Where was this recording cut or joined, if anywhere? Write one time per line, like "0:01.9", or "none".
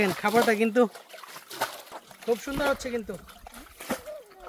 none

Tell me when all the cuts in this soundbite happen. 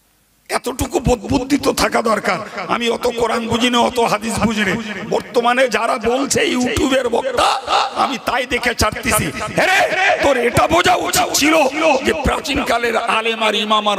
none

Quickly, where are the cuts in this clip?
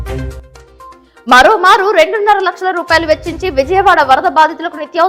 none

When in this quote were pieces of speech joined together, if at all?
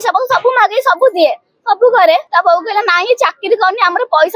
0:02.3

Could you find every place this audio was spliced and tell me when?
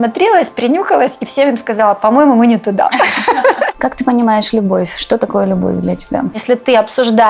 0:03.7
0:06.4

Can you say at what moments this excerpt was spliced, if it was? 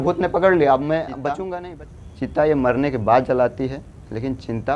0:01.5

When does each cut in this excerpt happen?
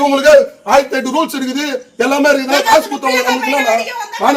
none

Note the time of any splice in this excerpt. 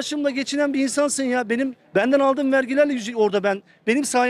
none

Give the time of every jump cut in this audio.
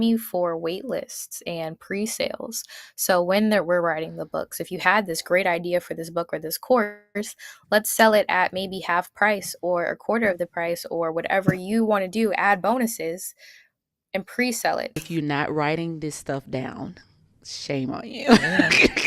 0:15.0

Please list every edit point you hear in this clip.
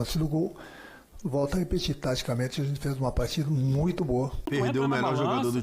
0:04.5

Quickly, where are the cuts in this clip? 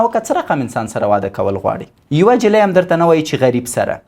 0:01.9

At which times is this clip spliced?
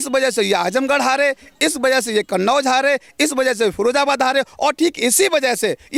none

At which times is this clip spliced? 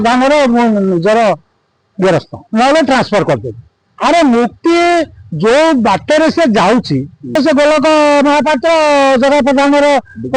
0:02.4
0:03.9

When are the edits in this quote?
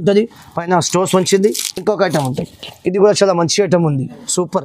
0:01.7

